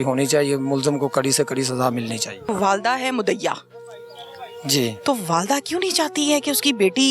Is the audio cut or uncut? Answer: cut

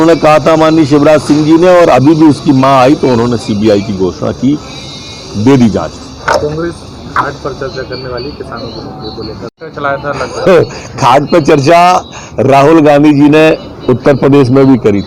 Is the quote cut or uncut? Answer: cut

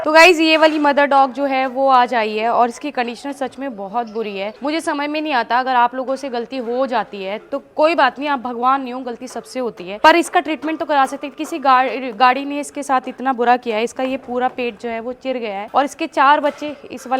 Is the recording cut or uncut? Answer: uncut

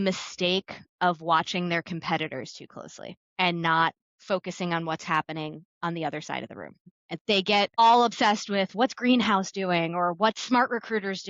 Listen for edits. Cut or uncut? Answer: uncut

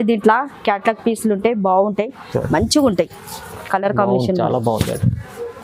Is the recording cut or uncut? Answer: uncut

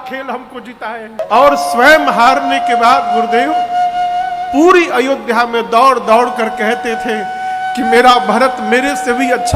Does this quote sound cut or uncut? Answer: cut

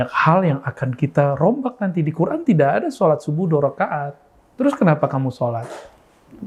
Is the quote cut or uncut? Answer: uncut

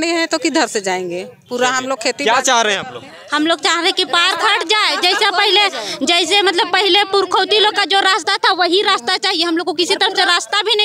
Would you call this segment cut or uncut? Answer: uncut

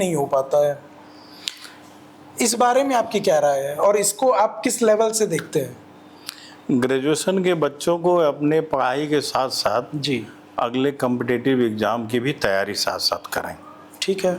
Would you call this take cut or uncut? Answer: uncut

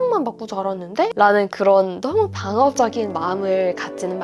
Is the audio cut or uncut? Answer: uncut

